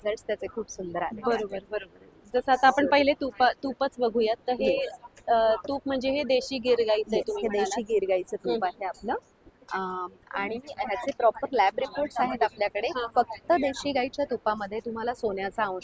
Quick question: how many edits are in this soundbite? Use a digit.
0